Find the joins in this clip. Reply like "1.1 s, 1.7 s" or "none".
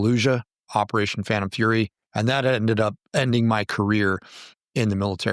2.0 s, 3.0 s